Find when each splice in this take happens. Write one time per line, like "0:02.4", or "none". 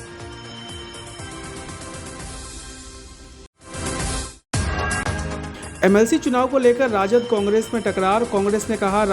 0:02.5